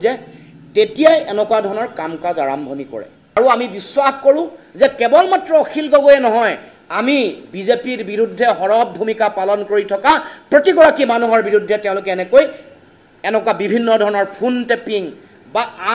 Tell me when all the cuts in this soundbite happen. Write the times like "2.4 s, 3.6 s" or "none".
3.3 s